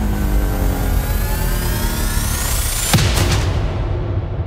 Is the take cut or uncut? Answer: uncut